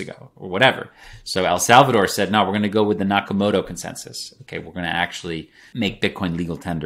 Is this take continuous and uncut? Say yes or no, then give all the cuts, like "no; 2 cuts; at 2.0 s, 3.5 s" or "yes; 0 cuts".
no; 1 cut; at 5.6 s